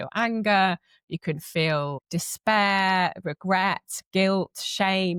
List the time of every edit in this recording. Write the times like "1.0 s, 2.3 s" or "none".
none